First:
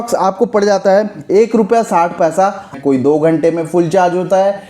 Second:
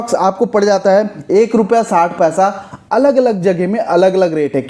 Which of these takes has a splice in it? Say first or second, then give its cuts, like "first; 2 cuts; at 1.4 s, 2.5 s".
first; 1 cut; at 2.8 s